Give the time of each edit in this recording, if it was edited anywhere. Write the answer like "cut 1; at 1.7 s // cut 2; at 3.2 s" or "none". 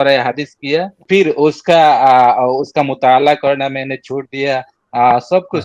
cut 1; at 1.1 s